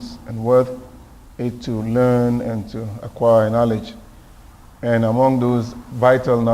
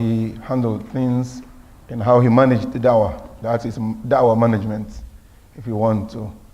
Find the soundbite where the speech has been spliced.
second; 1 cut; at 4.2 s

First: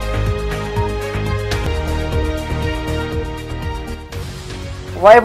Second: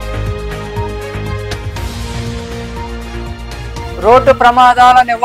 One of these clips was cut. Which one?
second; 1 cut; at 1.5 s

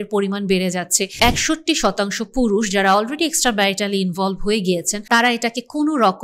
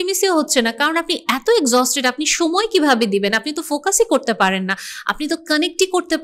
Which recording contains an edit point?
first; 2 cuts; at 1.0 s, 4.9 s

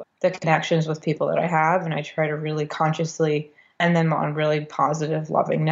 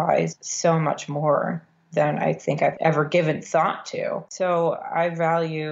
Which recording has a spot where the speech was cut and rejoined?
second; 2 cuts; at 2.8 s, 4.3 s

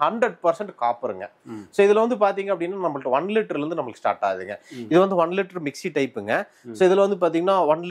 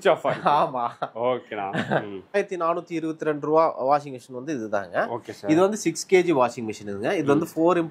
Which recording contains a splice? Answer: second; 1 cut; at 2.3 s

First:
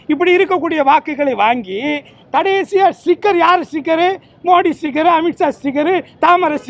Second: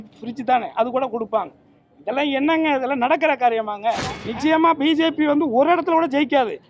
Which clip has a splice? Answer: second; 1 cut; at 4.2 s

